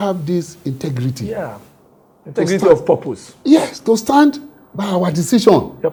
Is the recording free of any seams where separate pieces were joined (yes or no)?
yes